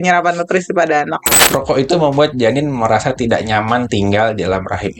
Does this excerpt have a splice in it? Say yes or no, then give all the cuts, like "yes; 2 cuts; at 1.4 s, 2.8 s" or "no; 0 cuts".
yes; 1 cut; at 1.3 s